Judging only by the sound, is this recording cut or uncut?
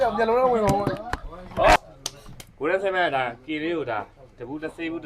cut